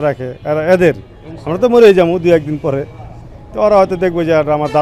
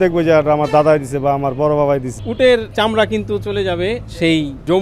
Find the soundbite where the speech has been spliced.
second; 1 cut; at 2.2 s

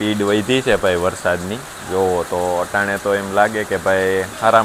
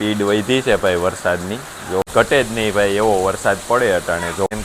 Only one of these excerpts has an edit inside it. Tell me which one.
second; 1 cut; at 2.0 s

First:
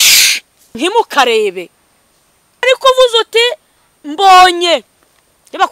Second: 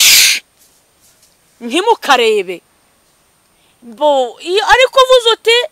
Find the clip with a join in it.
first; 2 cuts; at 0.8 s, 2.6 s

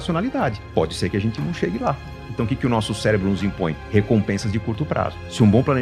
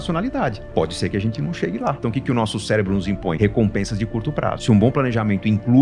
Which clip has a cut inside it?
second; 3 cuts; at 2.0 s, 3.4 s, 4.6 s

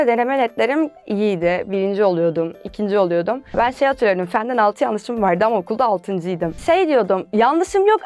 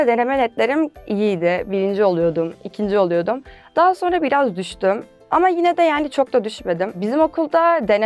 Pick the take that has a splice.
first; 2 cuts; at 3.5 s, 6.5 s

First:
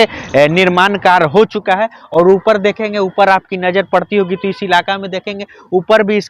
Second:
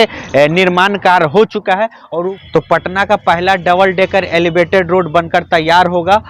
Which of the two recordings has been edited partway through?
second; 1 cut; at 2.0 s

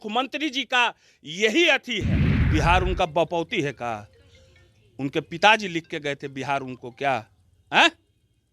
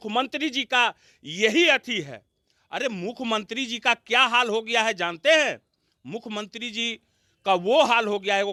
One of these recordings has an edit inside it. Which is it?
first; 1 cut; at 2.4 s

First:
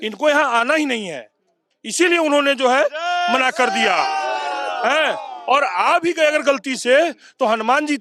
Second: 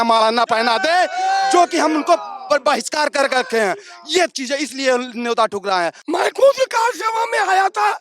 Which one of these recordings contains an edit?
second; 1 cut; at 6.0 s

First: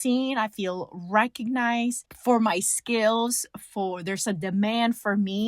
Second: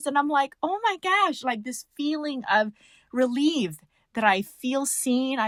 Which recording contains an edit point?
first; 1 cut; at 2.1 s

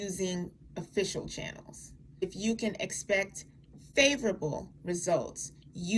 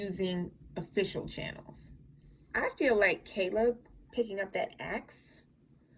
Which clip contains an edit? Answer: second; 1 cut; at 2.1 s

